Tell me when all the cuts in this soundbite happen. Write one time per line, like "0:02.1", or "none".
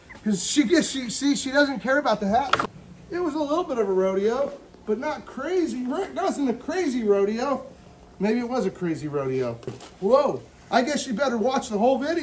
0:02.6
0:09.8